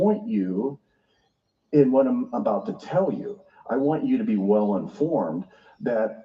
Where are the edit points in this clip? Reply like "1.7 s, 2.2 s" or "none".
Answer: none